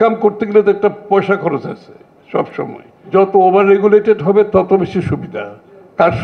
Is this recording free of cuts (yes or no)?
no